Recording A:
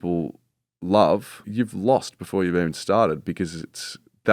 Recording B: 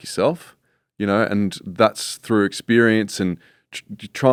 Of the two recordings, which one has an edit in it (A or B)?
A